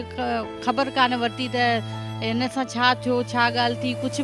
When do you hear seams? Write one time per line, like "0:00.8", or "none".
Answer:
none

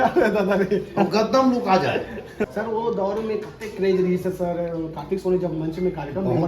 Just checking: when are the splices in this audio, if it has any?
0:02.5

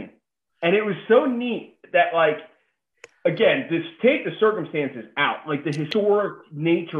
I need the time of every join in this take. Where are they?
0:05.9

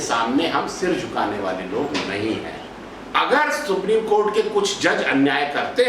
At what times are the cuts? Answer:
0:02.7

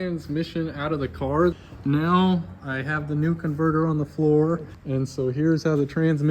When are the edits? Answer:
0:01.5
0:04.8

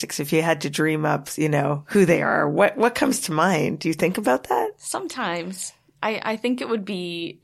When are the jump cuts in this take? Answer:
none

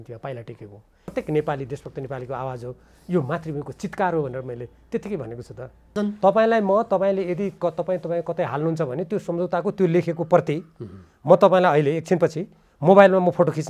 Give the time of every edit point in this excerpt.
0:01.1
0:05.9

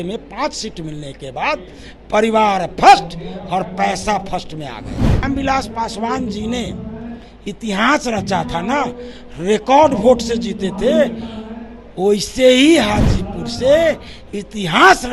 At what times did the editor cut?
0:05.2

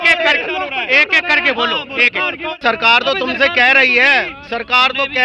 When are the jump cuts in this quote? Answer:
0:02.6

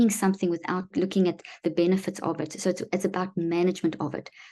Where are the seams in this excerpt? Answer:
0:00.9

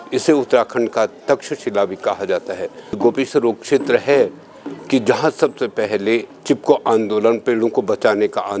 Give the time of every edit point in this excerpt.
0:03.0

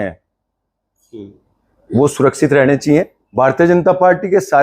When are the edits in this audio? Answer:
0:03.2

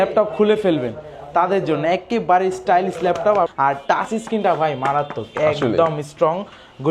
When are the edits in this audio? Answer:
0:03.5

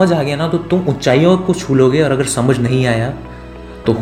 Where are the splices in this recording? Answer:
none

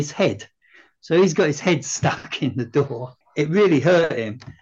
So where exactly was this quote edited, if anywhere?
0:03.2

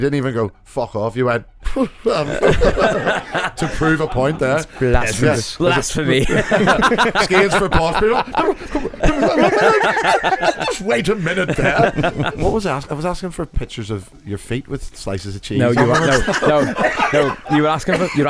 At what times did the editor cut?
0:12.4

